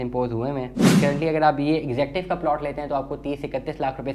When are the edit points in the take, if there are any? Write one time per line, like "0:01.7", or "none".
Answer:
0:01.0

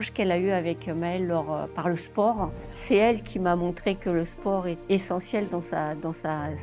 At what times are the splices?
0:02.6

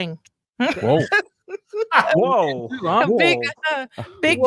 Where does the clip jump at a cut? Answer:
none

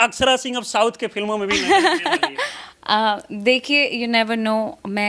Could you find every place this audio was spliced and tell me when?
none

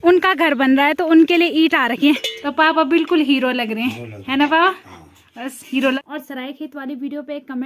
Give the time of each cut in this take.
0:02.4
0:06.0

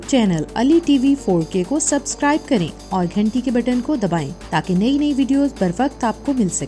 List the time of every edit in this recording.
none

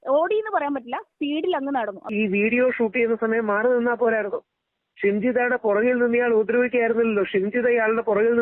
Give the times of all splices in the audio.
0:02.1

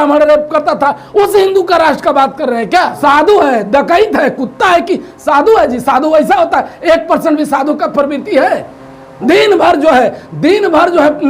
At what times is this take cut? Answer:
0:03.0

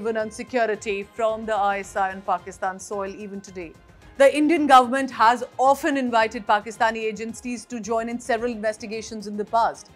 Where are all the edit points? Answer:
0:03.8

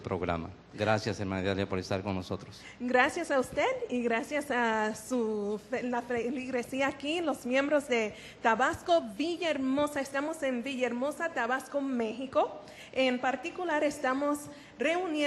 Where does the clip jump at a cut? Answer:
0:01.2

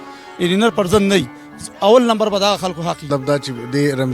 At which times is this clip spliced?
0:03.0

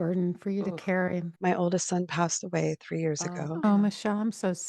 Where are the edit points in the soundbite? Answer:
0:01.3
0:03.6

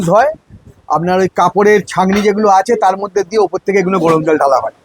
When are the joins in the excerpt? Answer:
none

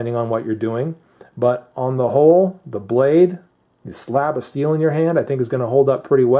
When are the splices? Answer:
none

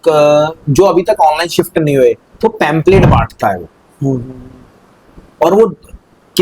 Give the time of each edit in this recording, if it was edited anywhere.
none

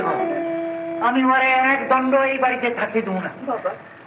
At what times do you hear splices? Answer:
none

